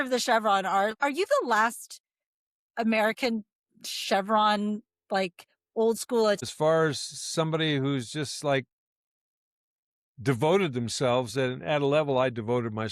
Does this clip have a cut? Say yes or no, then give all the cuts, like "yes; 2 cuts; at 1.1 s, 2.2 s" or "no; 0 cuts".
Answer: yes; 2 cuts; at 0.9 s, 6.4 s